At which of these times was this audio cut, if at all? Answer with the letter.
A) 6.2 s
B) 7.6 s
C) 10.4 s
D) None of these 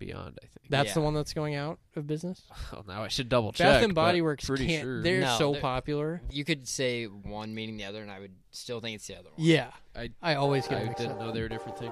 A